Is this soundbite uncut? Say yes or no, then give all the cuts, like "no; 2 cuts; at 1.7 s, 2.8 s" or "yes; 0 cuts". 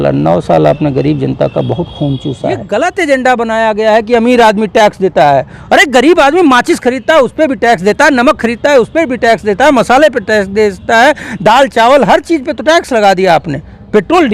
no; 1 cut; at 2.6 s